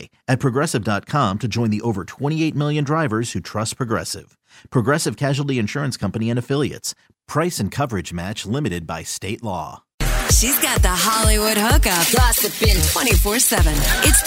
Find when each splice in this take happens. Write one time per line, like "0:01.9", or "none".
0:09.9